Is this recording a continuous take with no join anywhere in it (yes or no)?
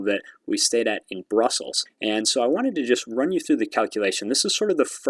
yes